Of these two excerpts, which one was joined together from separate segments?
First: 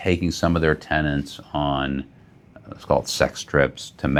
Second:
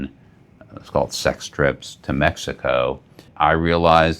second; 1 cut; at 3.3 s

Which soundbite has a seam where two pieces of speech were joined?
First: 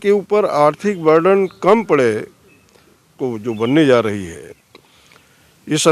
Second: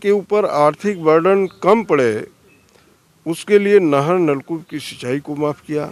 first; 1 cut; at 3.1 s

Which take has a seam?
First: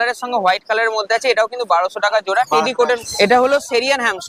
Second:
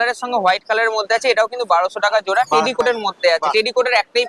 first; 1 cut; at 2.8 s

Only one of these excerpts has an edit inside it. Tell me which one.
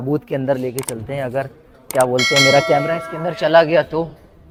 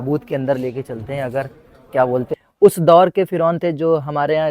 second; 1 cut; at 2.3 s

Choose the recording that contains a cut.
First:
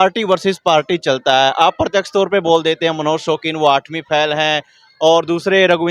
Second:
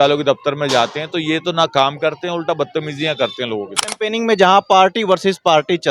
second; 1 cut; at 3.8 s

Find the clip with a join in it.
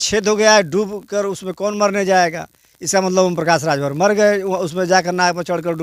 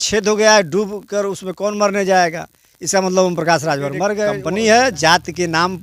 second; 1 cut; at 4.4 s

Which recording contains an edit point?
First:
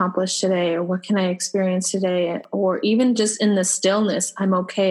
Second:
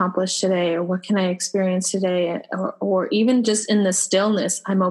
first; 1 cut; at 2.5 s

